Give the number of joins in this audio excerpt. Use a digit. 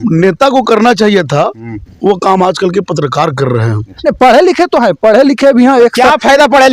1